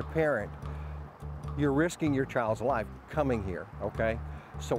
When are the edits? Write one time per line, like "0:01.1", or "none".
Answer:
none

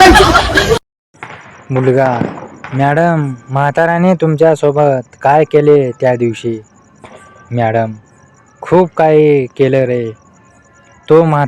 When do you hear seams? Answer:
0:00.9

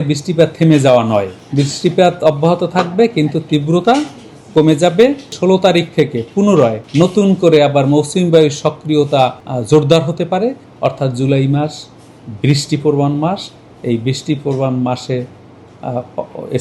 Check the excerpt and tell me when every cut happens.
0:01.4
0:05.3
0:06.8
0:09.5
0:10.7

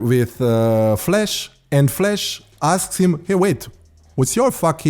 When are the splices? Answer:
none

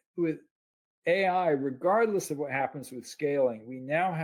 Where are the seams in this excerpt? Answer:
none

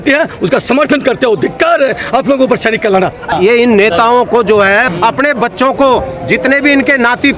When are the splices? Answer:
0:03.3
0:04.9

